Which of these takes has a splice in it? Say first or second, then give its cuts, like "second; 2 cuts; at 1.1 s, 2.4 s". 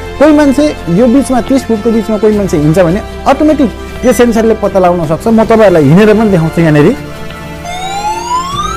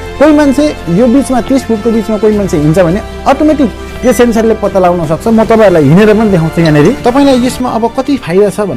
second; 1 cut; at 7.1 s